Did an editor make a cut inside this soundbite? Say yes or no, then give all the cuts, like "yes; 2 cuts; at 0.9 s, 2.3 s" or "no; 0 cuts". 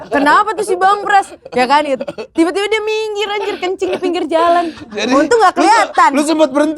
no; 0 cuts